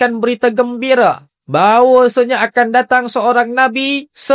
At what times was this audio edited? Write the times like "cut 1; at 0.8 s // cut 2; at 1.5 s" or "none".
cut 1; at 1.3 s